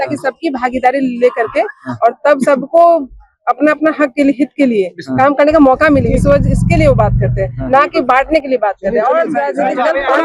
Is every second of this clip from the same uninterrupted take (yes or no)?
yes